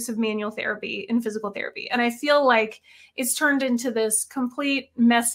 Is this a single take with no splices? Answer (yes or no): yes